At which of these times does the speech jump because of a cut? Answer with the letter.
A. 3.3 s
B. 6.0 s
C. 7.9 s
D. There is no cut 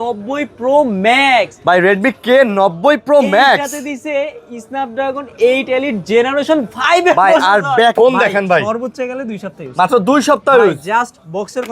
C